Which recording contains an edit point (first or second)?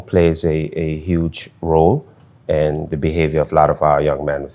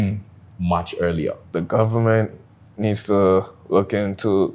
second